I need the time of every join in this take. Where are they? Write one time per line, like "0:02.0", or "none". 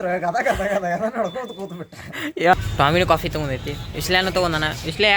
0:02.5